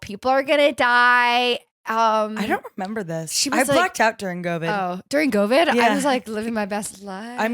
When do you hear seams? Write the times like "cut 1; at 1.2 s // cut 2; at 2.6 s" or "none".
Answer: none